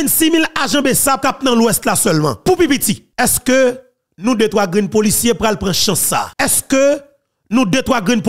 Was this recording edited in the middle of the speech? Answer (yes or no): yes